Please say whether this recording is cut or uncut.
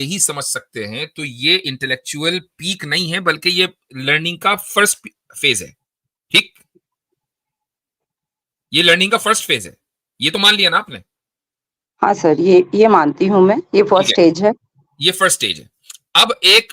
uncut